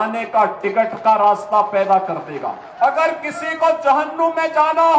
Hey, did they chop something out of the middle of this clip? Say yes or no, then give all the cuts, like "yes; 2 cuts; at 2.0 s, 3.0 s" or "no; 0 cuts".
yes; 1 cut; at 2.7 s